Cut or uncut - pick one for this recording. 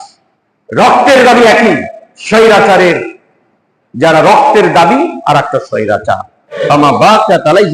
cut